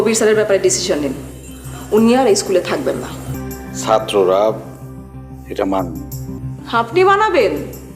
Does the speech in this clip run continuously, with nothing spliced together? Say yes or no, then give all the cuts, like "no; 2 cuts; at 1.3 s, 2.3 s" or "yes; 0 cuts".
no; 2 cuts; at 3.4 s, 6.4 s